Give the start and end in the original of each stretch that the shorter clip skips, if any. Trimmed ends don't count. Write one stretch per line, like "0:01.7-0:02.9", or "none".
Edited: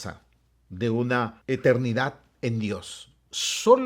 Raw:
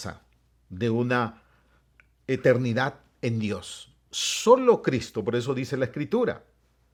0:01.4-0:02.2